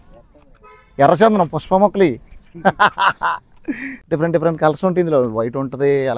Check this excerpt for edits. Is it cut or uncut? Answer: cut